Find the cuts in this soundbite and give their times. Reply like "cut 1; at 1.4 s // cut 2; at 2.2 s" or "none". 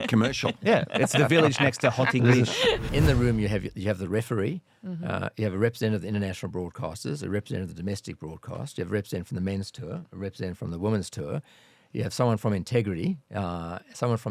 cut 1; at 2.8 s